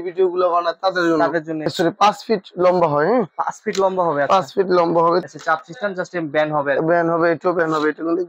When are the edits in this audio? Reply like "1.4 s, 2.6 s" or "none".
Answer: 1.7 s, 5.3 s